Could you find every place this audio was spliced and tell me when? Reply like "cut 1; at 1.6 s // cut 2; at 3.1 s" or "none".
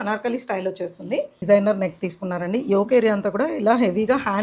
cut 1; at 1.4 s